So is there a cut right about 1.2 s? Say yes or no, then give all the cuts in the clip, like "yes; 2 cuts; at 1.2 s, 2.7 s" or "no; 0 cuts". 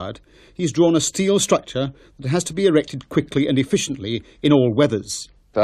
no; 0 cuts